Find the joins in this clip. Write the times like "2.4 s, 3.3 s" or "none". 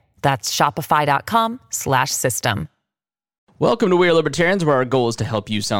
3.4 s